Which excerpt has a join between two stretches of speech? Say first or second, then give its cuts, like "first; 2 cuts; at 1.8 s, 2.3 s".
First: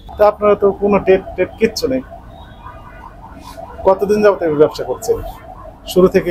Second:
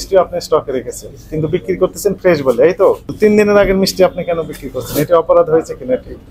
second; 1 cut; at 3.1 s